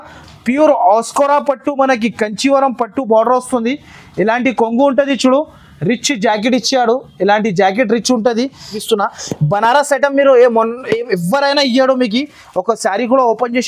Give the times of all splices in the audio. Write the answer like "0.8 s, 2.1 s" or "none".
8.8 s